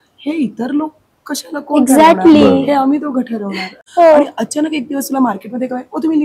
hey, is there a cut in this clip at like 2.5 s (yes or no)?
no